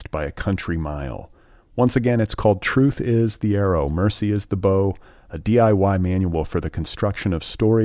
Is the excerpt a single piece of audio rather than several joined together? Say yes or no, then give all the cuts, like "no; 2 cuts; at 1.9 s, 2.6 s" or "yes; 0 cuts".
yes; 0 cuts